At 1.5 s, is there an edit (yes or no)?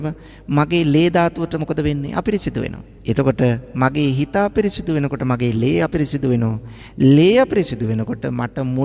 no